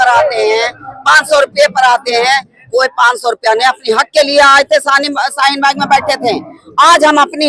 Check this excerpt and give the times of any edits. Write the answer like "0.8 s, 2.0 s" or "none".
none